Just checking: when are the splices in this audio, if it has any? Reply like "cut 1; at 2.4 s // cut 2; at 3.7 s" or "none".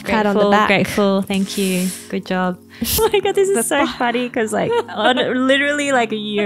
cut 1; at 3.0 s